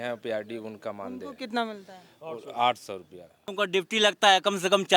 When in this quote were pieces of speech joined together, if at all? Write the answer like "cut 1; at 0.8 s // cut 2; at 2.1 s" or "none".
cut 1; at 3.5 s